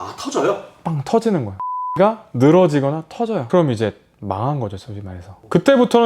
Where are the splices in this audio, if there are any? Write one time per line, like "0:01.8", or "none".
0:01.9